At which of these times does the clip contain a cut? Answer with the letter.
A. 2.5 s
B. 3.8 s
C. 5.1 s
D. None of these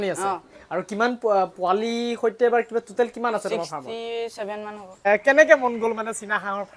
C